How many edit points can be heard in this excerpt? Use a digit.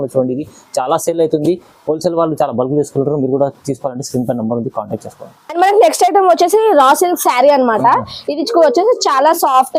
0